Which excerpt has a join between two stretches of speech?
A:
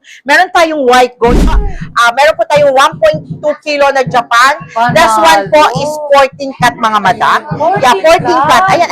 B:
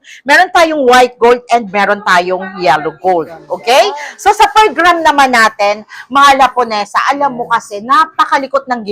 A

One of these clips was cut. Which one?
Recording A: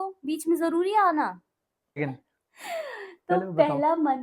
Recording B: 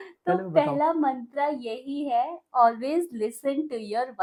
A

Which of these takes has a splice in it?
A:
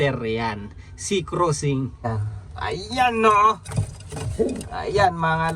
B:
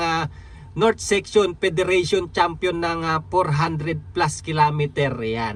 A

